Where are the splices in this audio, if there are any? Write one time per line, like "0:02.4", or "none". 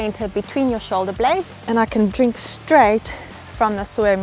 0:01.6